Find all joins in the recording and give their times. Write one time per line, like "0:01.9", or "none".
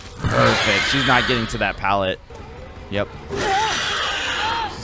0:02.3